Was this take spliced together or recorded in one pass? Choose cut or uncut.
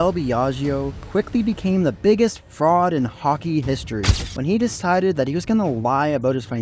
cut